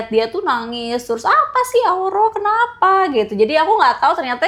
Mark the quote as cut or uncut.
uncut